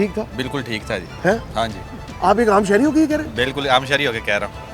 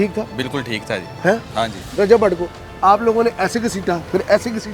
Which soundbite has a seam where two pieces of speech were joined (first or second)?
second